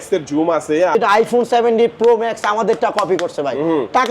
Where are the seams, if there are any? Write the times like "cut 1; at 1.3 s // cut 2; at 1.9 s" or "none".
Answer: cut 1; at 0.9 s